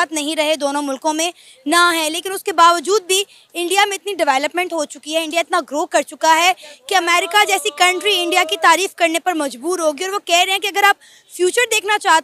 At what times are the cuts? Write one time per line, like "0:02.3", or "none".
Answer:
none